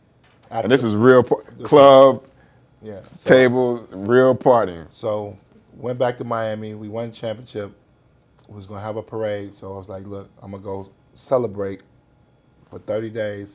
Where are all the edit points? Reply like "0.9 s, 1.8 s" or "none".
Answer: none